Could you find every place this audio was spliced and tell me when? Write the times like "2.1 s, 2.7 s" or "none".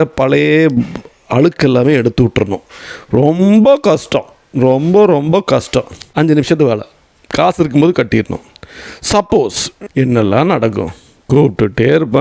6.0 s, 9.7 s